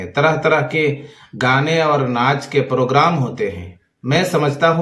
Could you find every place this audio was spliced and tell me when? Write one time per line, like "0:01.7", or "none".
none